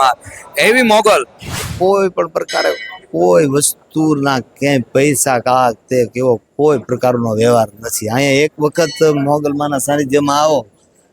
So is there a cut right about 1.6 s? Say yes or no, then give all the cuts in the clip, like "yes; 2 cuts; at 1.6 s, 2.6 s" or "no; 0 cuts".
yes; 1 cut; at 1.6 s